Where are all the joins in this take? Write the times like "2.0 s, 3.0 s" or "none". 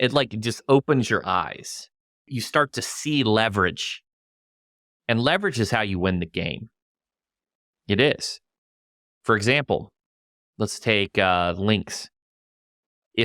2.3 s